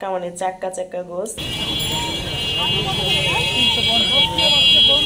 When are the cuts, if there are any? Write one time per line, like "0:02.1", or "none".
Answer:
0:01.4